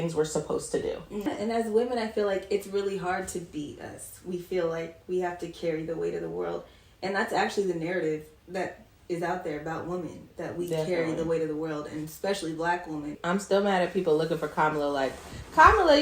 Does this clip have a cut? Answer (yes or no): yes